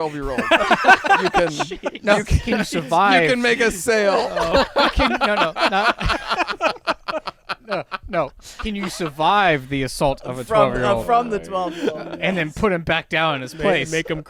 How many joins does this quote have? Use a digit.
0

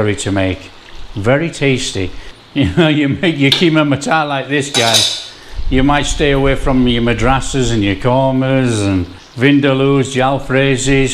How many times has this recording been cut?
2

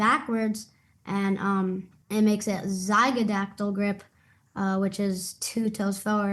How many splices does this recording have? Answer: 1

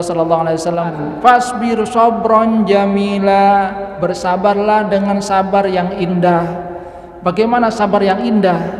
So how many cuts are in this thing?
1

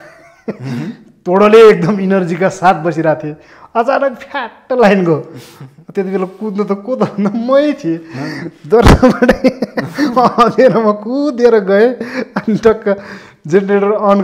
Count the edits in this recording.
0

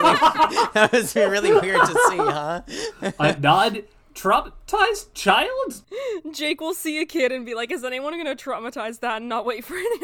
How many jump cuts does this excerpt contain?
1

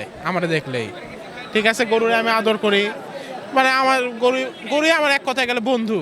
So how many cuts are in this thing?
0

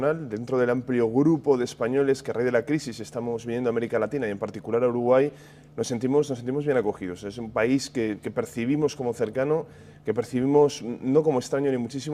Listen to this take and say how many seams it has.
1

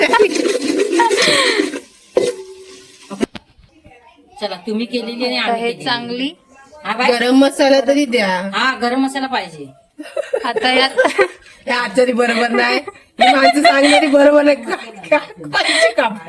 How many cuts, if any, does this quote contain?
1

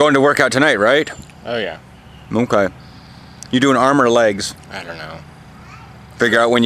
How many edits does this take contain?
1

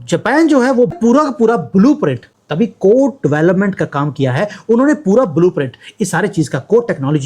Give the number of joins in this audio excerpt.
1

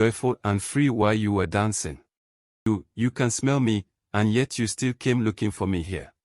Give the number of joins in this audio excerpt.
1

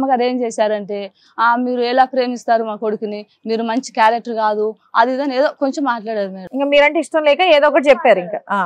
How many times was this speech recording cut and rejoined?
0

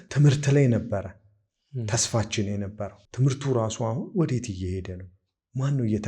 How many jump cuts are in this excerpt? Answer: 1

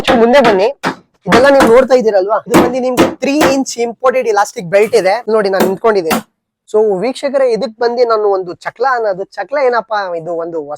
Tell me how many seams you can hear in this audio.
3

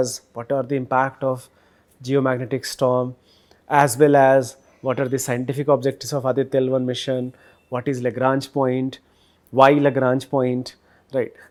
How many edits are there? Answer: 0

